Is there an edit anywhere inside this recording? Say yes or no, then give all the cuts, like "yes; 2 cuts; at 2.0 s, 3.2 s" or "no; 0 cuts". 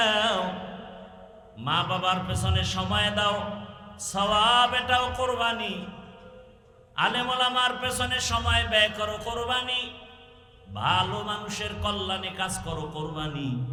no; 0 cuts